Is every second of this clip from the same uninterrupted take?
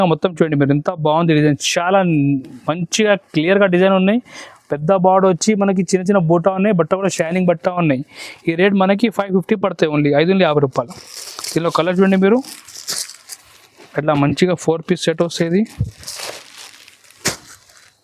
yes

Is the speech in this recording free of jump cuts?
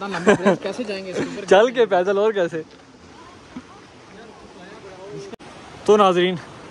no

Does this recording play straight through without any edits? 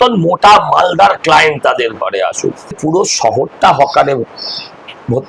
no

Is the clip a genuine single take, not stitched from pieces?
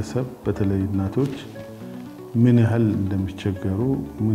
yes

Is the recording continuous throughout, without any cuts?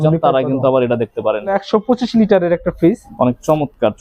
no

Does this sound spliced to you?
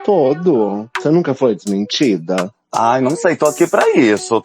yes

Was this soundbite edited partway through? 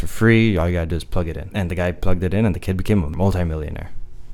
yes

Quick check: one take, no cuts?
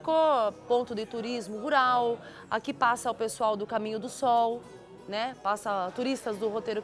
yes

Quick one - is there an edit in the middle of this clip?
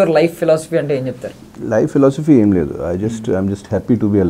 no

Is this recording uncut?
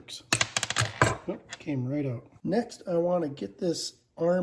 no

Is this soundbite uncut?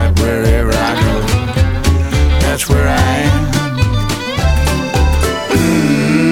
yes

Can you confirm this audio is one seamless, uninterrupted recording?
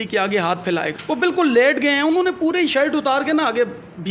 no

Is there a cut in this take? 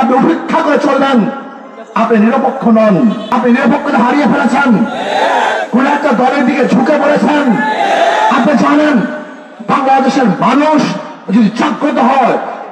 yes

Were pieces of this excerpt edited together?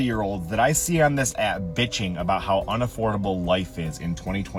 no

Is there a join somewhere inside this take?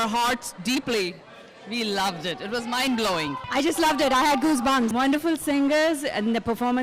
yes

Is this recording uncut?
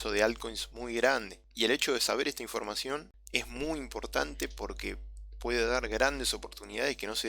no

